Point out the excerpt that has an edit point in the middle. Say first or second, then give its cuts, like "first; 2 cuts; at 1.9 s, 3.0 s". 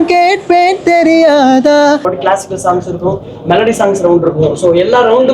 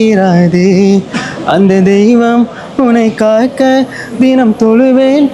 first; 1 cut; at 2.1 s